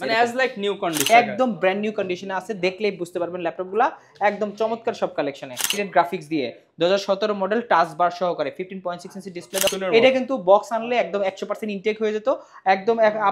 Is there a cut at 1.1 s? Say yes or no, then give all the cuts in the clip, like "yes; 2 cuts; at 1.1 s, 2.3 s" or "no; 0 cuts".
yes; 3 cuts; at 1.1 s, 5.7 s, 9.7 s